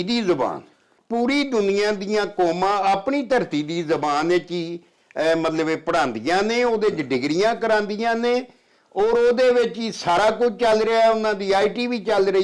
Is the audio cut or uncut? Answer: cut